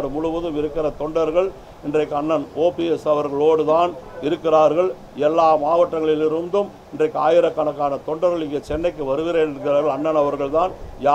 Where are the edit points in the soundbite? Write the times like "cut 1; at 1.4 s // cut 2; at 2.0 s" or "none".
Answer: none

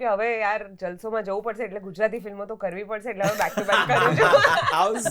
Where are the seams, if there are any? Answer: none

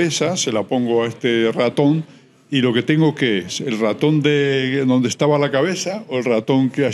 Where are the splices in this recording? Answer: none

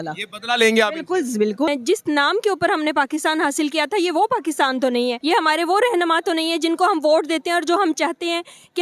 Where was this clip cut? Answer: cut 1; at 1.7 s // cut 2; at 5.2 s

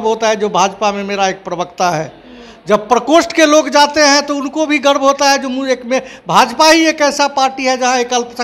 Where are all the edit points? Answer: none

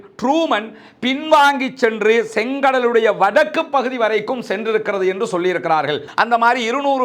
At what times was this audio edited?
cut 1; at 6.1 s

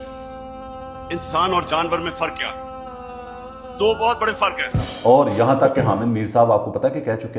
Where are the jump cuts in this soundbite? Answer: cut 1; at 5.0 s

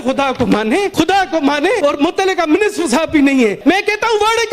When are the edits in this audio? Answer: cut 1; at 0.9 s // cut 2; at 1.8 s // cut 3; at 3.6 s

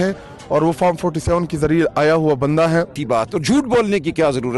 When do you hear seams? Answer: cut 1; at 3.0 s

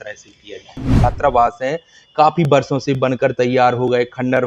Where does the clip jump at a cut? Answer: cut 1; at 1.0 s

